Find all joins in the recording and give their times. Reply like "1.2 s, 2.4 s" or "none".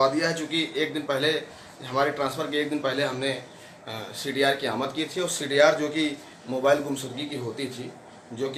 none